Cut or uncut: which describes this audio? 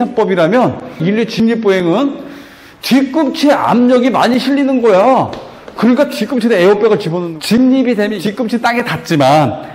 cut